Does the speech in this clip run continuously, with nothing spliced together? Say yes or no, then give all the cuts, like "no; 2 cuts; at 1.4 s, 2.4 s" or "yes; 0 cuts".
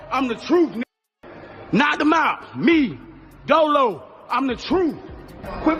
yes; 0 cuts